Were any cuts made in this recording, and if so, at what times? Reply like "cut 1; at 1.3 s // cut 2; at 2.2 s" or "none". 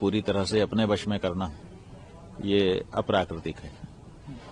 none